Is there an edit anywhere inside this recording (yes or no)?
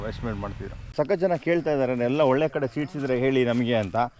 yes